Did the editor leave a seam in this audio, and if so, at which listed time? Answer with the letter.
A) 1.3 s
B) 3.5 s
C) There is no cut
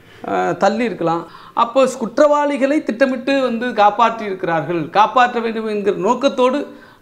A